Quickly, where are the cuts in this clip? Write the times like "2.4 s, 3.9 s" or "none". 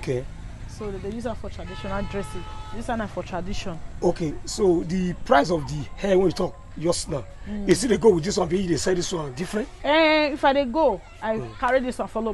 none